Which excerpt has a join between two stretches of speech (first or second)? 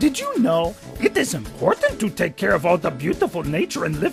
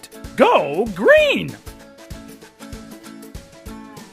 second